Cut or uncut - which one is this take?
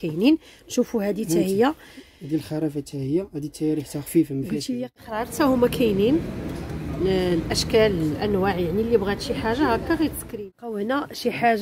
cut